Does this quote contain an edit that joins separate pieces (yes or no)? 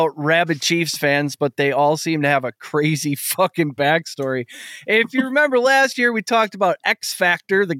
no